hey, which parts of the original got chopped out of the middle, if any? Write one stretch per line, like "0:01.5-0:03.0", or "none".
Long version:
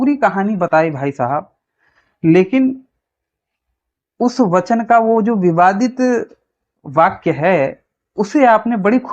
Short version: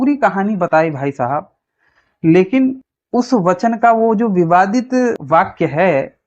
0:02.9-0:04.0
0:06.3-0:06.9